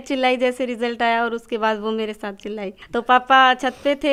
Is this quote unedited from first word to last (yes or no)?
yes